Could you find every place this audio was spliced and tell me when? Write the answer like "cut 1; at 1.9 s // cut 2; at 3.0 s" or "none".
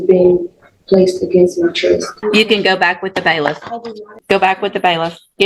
cut 1; at 2.1 s // cut 2; at 4.2 s